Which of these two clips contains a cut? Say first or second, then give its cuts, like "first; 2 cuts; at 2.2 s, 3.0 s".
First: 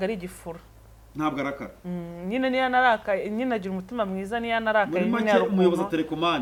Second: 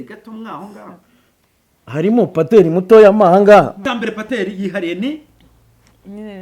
second; 1 cut; at 3.8 s